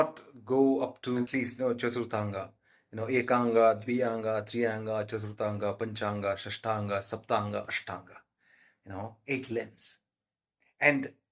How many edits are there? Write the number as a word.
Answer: one